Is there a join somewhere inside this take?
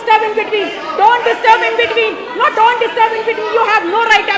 no; 0 cuts

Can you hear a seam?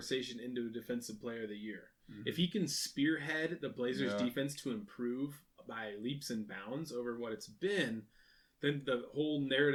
no; 0 cuts

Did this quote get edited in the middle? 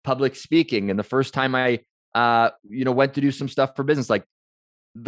no; 0 cuts

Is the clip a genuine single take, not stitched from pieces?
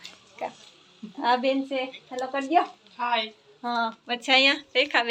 yes; 0 cuts

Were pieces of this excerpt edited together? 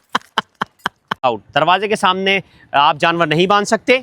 yes; 1 cut; at 1.2 s

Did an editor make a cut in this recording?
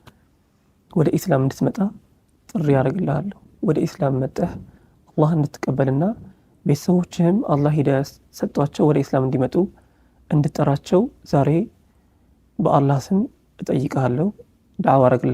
no; 0 cuts

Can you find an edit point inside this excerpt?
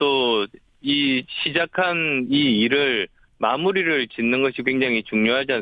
yes; 1 cut; at 1.1 s

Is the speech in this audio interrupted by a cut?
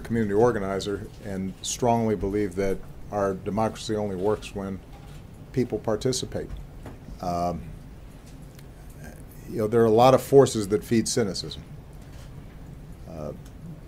yes; 1 cut; at 3.2 s

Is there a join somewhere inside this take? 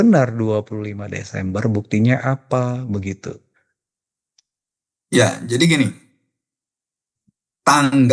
no; 0 cuts

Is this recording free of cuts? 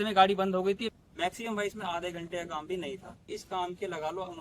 no; 2 cuts; at 0.9 s, 3.2 s

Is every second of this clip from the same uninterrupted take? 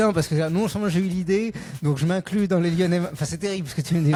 yes; 0 cuts

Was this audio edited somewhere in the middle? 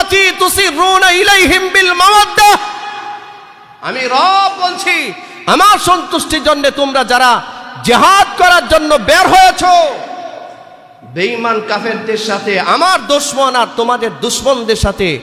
no; 0 cuts

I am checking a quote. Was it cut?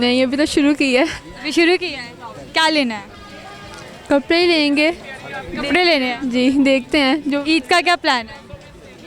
no; 0 cuts

